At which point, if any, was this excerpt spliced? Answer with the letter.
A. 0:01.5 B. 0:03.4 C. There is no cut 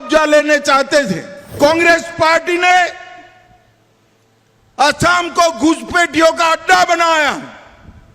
A